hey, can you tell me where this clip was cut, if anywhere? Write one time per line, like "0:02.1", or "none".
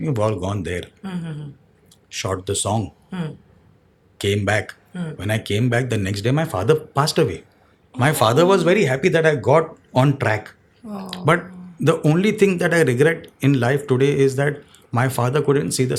none